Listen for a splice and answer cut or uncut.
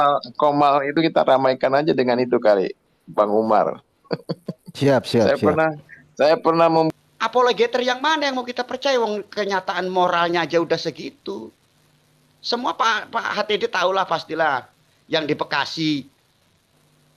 cut